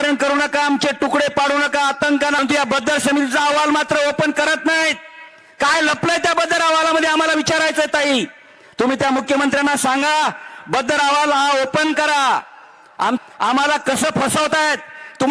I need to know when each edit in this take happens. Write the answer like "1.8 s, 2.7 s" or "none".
2.4 s, 13.2 s